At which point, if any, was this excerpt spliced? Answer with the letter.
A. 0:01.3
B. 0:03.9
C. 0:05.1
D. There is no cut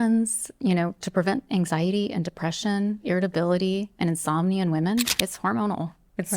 C